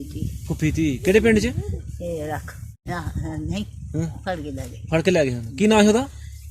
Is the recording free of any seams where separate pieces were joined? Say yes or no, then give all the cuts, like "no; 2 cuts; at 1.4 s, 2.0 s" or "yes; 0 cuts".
no; 1 cut; at 2.8 s